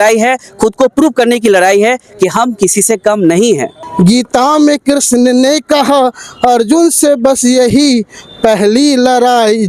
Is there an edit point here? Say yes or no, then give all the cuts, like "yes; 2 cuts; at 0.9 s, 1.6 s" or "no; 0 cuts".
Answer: yes; 1 cut; at 3.8 s